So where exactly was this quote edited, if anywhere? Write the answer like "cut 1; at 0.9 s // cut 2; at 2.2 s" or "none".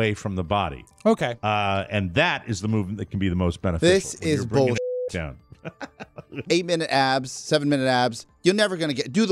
cut 1; at 6.4 s